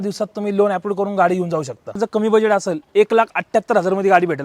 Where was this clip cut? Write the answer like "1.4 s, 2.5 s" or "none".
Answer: 1.9 s